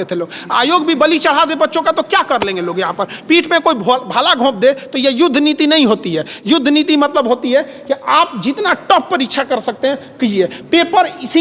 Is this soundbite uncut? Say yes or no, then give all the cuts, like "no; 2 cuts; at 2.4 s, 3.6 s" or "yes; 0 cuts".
yes; 0 cuts